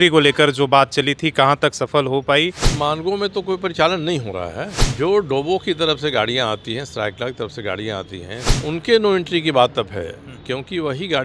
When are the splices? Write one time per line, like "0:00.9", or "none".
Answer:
0:02.6
0:04.8
0:08.5